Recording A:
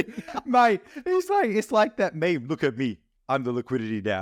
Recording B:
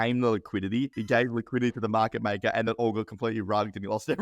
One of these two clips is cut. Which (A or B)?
B